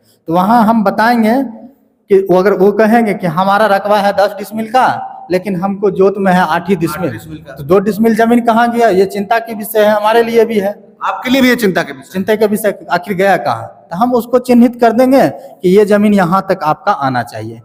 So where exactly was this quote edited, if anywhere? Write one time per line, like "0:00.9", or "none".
none